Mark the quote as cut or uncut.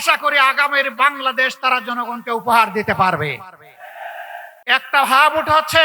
cut